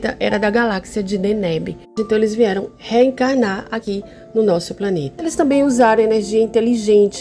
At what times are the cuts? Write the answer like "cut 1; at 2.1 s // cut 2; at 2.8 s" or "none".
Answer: cut 1; at 2.7 s // cut 2; at 3.8 s // cut 3; at 5.3 s